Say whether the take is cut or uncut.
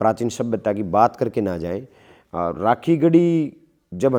uncut